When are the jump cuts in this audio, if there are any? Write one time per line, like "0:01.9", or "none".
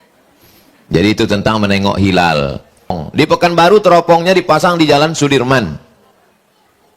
0:03.0